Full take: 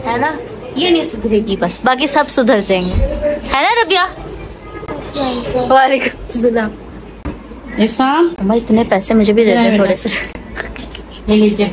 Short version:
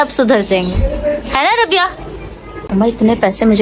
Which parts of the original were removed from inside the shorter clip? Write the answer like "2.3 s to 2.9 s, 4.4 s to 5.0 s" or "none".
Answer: 4.9 s to 8.4 s